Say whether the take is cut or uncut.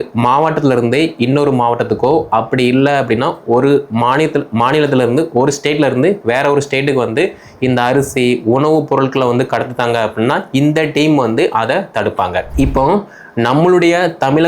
cut